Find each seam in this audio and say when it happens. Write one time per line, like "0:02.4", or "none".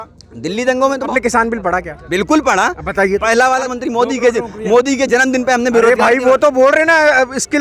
0:01.1
0:03.7